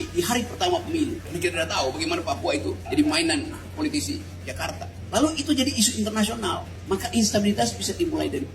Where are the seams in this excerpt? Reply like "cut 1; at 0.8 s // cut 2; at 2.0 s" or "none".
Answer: cut 1; at 1.3 s // cut 2; at 2.8 s // cut 3; at 4.9 s // cut 4; at 6.7 s